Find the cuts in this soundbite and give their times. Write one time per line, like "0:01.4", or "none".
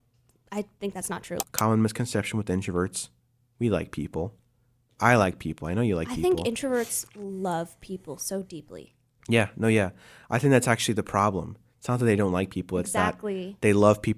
0:01.4